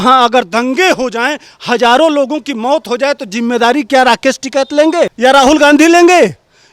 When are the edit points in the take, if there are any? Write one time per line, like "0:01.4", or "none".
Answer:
0:05.1